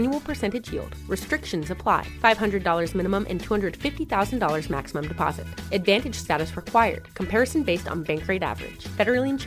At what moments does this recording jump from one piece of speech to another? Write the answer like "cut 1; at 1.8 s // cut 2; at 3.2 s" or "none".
none